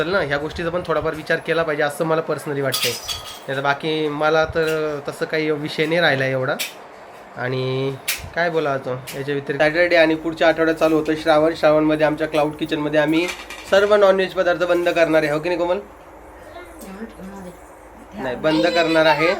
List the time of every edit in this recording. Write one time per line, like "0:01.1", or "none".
0:09.5